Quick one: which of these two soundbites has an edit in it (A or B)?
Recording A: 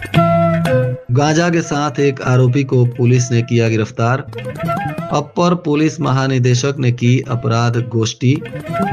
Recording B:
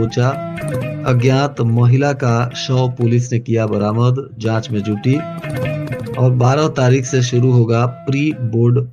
A